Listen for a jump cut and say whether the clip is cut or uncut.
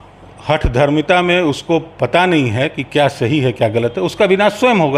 uncut